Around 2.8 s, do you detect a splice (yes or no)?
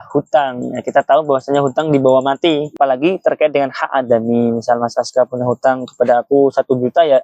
yes